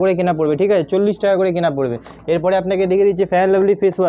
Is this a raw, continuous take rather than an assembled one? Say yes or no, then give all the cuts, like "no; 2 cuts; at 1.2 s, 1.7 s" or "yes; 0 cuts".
yes; 0 cuts